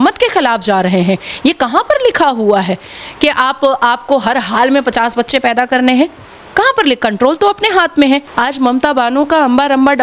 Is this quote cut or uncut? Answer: cut